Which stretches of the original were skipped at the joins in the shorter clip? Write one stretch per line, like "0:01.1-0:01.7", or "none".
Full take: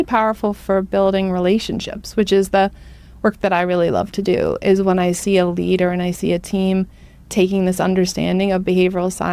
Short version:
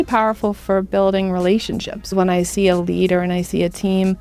0:02.1-0:04.8